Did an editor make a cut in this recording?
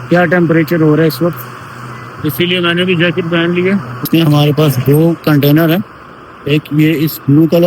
yes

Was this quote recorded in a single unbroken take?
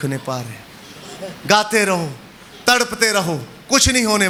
yes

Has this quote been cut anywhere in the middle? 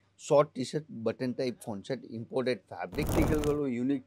yes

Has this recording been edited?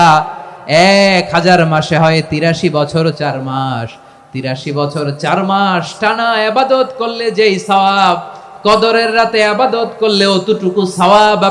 no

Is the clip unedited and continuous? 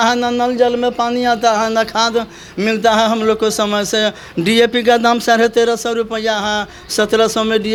yes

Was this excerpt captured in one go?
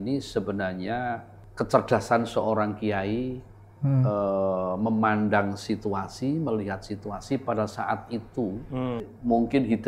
no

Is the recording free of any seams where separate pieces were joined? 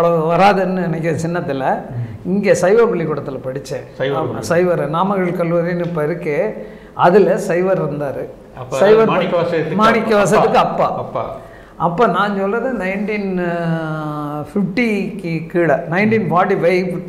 yes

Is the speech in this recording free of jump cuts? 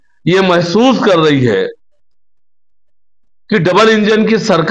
yes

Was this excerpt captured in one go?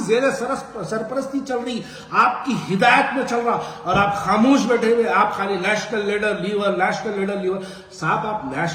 yes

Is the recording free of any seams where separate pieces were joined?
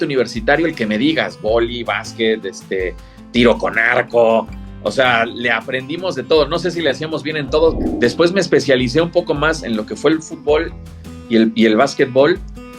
no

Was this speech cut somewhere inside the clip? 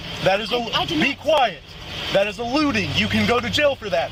no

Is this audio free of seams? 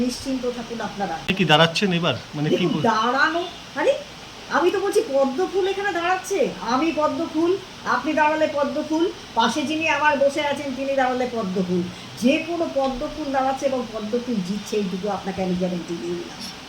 no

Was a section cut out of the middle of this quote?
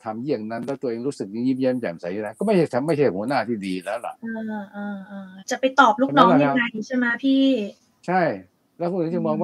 no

